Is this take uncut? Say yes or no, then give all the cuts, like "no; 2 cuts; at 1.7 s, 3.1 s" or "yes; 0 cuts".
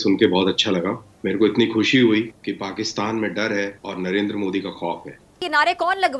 no; 4 cuts; at 1.1 s, 2.4 s, 3.8 s, 5.4 s